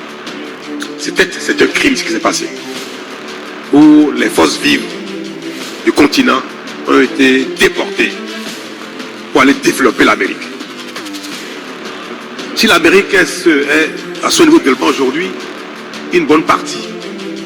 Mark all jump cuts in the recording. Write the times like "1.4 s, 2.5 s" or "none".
10.6 s, 12.1 s